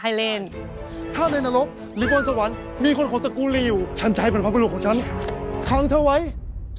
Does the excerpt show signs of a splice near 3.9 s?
no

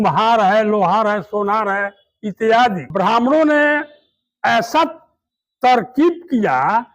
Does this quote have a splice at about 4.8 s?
no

